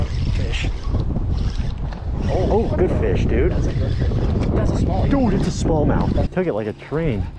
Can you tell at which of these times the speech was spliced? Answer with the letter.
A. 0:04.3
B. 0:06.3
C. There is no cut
B